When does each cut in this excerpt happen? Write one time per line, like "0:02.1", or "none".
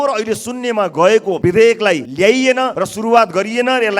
0:01.3
0:02.1
0:02.8